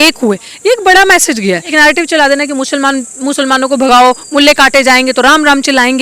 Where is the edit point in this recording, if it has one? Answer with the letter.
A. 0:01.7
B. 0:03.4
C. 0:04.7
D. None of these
A